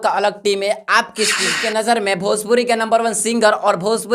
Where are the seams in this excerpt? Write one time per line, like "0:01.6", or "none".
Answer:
0:01.6